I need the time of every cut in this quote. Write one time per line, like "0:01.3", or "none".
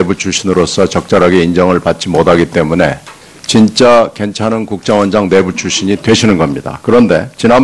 0:01.0